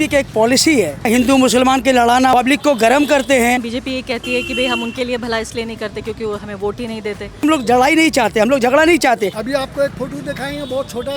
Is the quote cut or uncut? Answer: cut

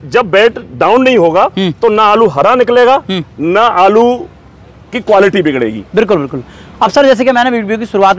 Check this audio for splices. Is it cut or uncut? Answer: uncut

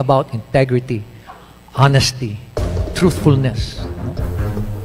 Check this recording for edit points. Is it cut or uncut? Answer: uncut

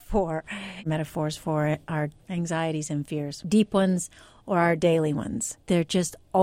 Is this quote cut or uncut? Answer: cut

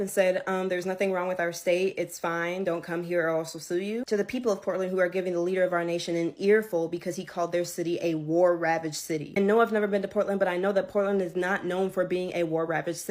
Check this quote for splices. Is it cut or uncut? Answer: uncut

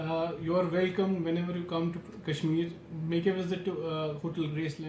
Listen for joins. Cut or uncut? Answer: uncut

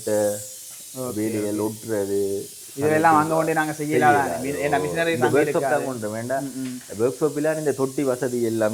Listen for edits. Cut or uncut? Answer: uncut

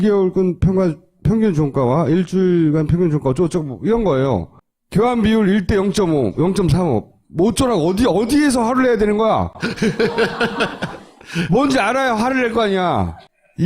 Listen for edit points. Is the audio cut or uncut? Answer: cut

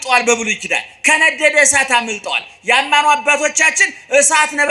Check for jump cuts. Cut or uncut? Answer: uncut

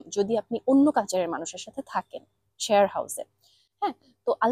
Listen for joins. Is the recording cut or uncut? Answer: uncut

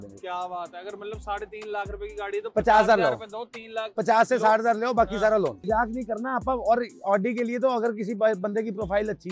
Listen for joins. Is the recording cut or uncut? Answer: cut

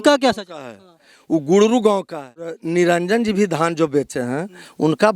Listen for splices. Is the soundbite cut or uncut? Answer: cut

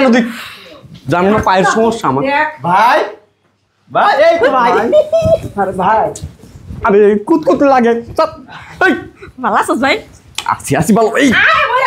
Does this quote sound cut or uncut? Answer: uncut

